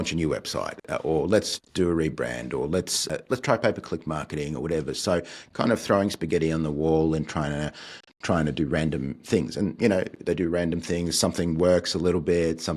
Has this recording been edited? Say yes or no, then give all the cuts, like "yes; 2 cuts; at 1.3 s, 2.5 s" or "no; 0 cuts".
yes; 2 cuts; at 0.9 s, 3.1 s